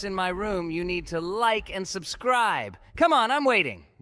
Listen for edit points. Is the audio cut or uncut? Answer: uncut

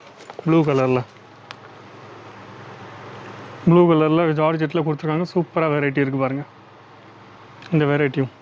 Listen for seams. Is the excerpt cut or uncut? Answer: uncut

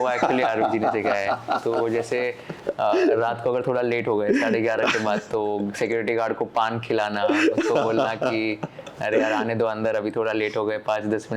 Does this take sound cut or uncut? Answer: uncut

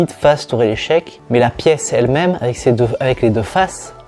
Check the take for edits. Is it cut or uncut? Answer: cut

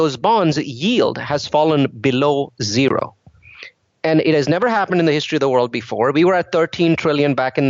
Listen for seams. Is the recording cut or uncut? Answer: uncut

